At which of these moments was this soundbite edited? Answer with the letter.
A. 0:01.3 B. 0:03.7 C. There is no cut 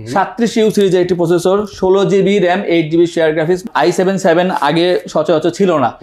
B